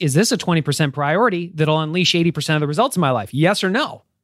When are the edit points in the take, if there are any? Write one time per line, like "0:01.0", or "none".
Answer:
none